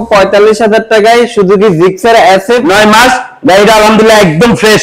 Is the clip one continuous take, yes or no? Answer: no